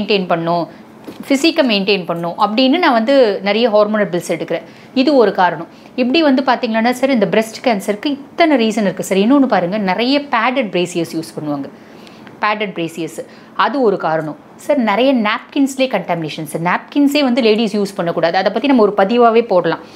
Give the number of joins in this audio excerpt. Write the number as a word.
zero